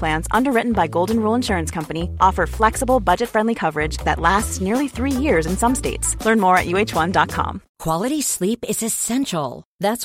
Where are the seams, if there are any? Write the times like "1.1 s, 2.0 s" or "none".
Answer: 7.7 s